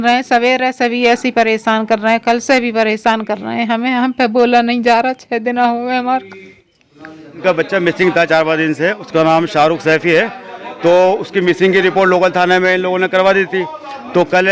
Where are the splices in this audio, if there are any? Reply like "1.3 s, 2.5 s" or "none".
7.4 s